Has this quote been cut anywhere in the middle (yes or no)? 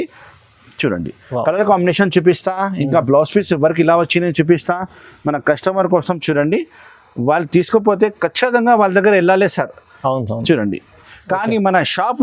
yes